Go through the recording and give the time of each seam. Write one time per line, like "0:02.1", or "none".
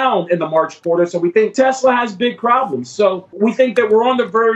0:01.5
0:03.3